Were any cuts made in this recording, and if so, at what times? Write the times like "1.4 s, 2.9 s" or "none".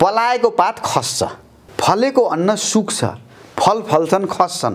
1.6 s

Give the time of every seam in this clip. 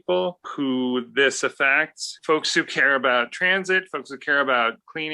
2.1 s

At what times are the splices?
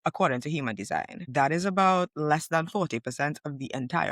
1.3 s

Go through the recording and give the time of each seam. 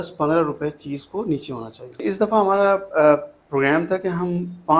2.0 s

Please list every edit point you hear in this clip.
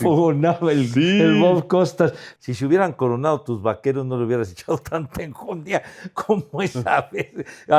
2.2 s

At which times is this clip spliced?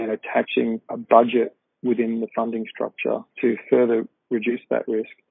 0.9 s, 3.3 s

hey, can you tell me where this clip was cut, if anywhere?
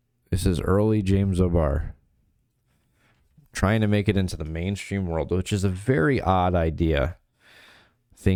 none

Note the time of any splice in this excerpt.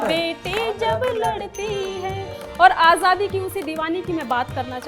none

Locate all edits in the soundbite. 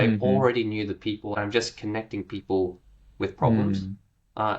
1.3 s

